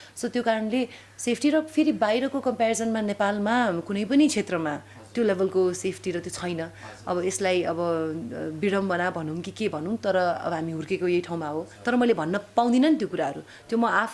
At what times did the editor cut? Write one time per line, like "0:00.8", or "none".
0:11.7